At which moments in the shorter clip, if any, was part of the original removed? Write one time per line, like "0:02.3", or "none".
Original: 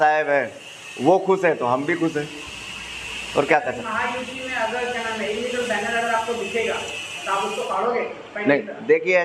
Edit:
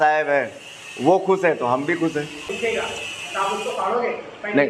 0:02.5